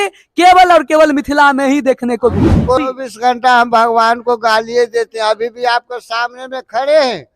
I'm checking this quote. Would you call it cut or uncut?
cut